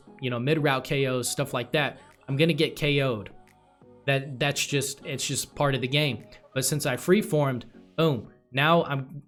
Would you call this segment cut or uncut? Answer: uncut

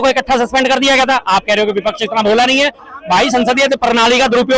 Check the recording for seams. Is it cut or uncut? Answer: uncut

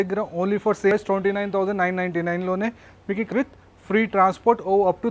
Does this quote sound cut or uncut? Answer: cut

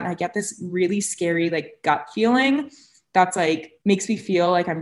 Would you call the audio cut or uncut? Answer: cut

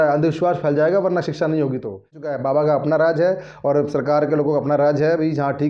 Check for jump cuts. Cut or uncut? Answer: cut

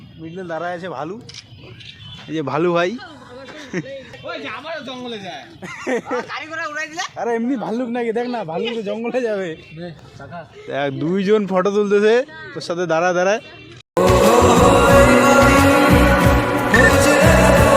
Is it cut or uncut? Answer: cut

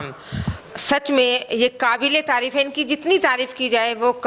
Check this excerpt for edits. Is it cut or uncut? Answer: uncut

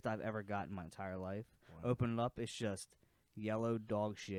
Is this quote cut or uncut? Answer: uncut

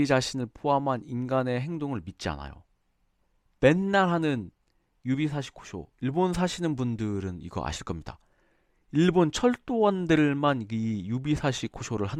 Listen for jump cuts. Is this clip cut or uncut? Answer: uncut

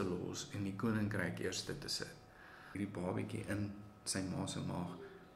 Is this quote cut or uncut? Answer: cut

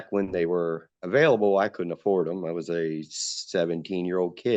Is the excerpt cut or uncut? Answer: uncut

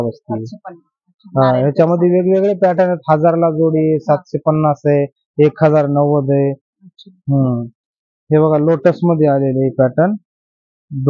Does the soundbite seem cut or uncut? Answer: uncut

